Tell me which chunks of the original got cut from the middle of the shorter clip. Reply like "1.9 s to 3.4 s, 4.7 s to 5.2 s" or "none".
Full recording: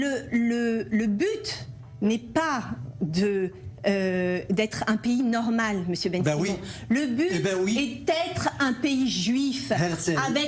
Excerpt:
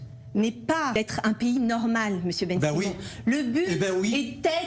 2.6 s to 4.6 s